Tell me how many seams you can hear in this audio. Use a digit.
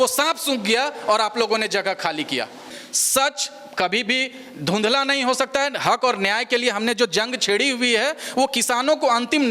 0